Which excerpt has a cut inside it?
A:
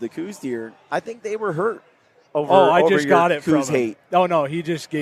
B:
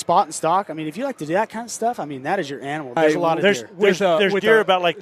B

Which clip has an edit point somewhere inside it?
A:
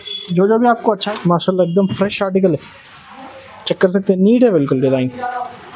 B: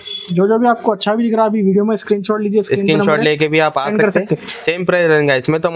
A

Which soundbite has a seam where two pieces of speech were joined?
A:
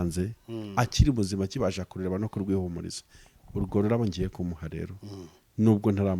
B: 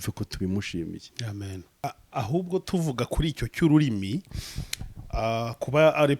B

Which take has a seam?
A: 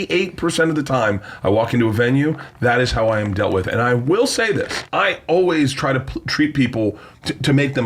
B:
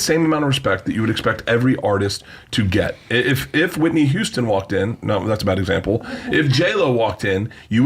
A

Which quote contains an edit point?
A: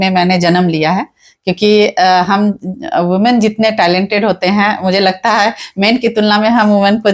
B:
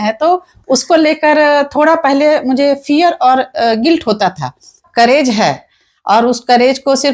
B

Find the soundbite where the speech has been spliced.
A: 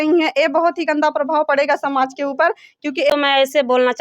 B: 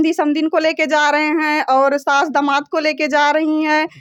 A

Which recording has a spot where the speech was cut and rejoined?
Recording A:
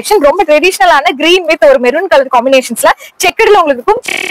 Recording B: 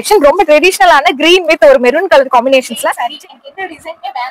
B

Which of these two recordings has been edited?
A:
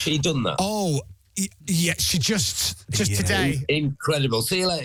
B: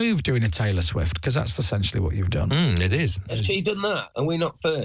B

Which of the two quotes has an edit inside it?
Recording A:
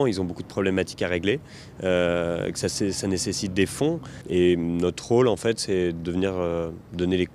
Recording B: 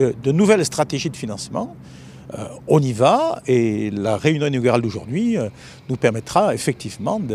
A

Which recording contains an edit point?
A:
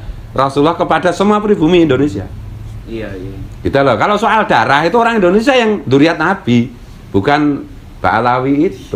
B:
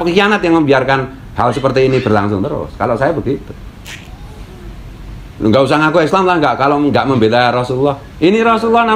A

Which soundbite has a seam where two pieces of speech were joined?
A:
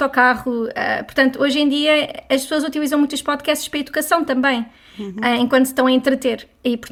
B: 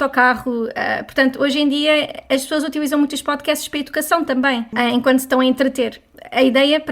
B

